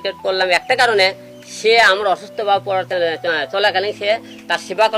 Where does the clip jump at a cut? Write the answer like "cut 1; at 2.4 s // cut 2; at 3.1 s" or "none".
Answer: none